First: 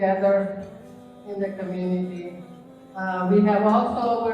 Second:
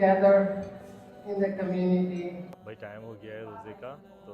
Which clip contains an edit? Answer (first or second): second